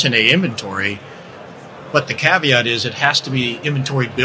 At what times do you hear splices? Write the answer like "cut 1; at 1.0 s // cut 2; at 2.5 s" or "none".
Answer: none